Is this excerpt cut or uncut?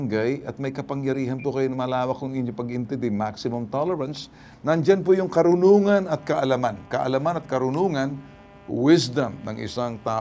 uncut